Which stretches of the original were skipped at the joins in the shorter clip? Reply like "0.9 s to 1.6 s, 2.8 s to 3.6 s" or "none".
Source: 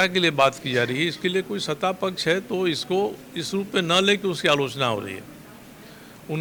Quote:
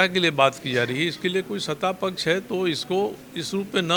none